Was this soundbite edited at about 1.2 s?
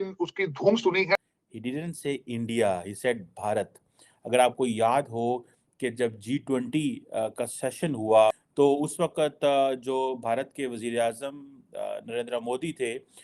yes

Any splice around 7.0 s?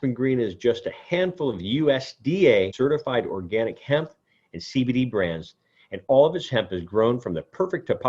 no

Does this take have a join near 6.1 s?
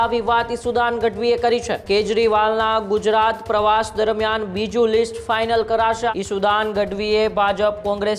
yes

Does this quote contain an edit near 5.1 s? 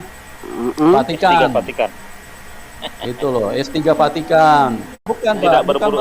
yes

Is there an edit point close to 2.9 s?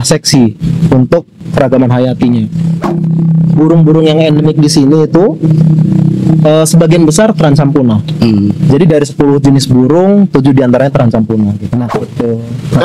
yes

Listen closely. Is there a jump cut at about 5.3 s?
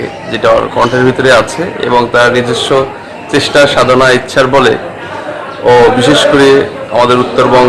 no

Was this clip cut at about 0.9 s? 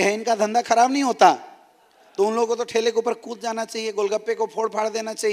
no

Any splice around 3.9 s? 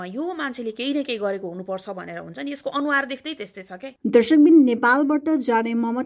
yes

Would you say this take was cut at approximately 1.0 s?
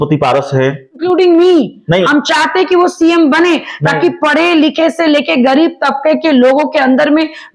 yes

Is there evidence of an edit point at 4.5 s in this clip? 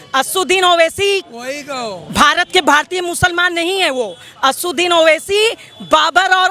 no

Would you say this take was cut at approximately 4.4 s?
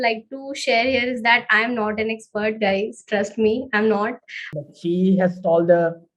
yes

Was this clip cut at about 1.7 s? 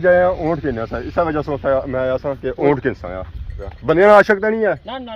no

